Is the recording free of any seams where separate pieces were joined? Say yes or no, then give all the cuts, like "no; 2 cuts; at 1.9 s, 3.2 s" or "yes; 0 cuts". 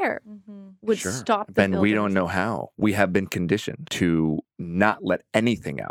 no; 3 cuts; at 2.6 s, 3.8 s, 4.6 s